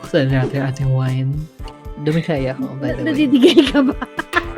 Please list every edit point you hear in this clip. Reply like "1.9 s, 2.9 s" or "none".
2.0 s